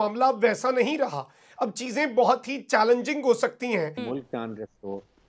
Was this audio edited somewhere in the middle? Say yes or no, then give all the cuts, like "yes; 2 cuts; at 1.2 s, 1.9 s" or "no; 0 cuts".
yes; 1 cut; at 3.9 s